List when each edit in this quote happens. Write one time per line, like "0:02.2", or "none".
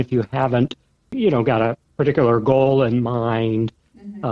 0:01.1